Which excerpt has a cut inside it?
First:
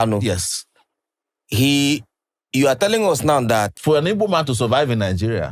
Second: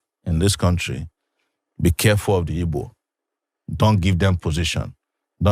first; 1 cut; at 3.7 s

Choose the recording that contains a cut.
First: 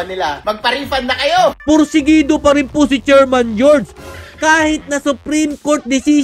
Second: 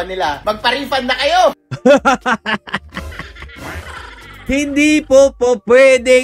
first; 1 cut; at 1.6 s

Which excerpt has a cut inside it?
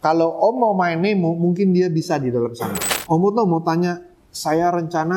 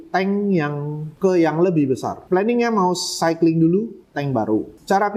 first; 1 cut; at 2.8 s

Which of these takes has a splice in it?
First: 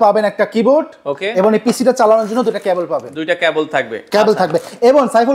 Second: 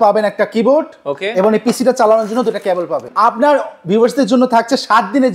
second; 1 cut; at 3.0 s

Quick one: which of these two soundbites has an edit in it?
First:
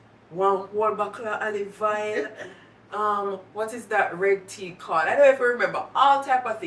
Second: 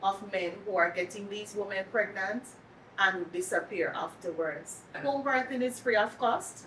second; 1 cut; at 5.0 s

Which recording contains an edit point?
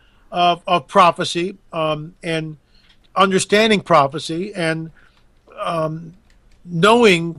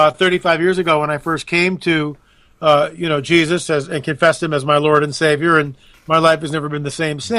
second; 1 cut; at 5.2 s

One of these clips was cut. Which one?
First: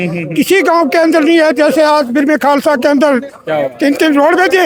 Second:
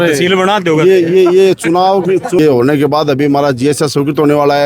second; 1 cut; at 2.4 s

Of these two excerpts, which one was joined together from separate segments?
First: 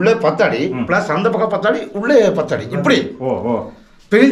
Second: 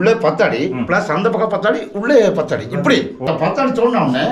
second; 1 cut; at 3.2 s

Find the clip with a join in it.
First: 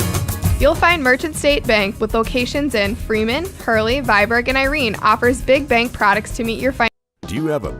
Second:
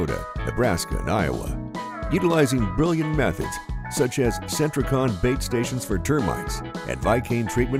first; 1 cut; at 6.9 s

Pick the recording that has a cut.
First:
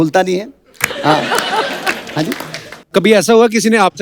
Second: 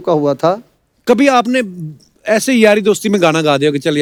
first; 1 cut; at 2.8 s

